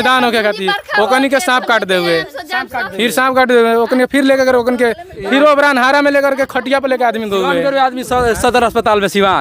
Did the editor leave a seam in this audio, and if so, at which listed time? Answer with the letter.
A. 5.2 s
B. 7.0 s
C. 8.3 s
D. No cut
D